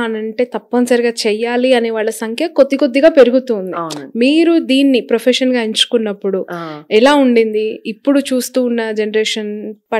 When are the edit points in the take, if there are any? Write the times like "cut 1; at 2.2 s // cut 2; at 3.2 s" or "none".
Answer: none